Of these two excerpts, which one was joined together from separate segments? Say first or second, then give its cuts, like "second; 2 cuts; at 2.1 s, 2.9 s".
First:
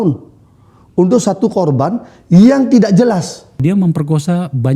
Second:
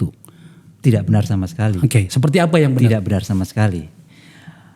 first; 1 cut; at 3.6 s